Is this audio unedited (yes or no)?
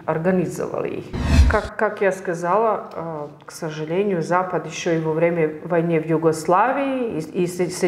no